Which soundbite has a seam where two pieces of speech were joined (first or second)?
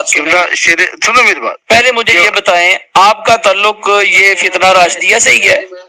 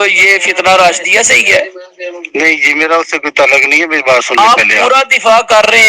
second